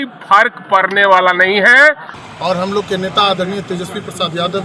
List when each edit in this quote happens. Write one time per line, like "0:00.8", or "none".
0:02.1